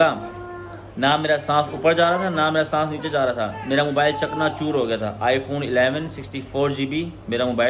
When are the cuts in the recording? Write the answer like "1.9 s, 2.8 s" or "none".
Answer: none